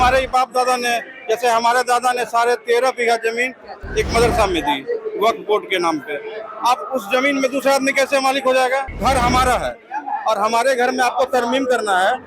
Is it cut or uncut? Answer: cut